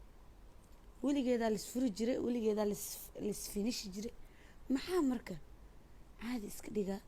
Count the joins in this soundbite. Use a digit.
0